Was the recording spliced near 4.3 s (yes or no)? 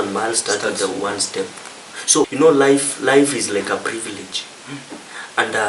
no